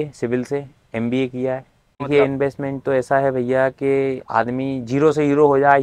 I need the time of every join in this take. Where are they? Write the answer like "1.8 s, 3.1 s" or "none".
2.1 s